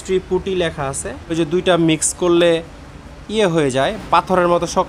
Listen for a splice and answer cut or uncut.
cut